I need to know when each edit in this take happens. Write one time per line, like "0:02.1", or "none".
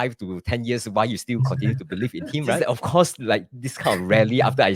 0:02.6